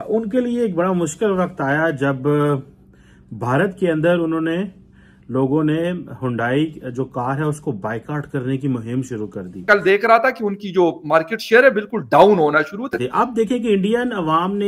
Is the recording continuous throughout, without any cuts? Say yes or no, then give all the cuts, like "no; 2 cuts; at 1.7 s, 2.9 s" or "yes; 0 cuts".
no; 2 cuts; at 9.6 s, 13.0 s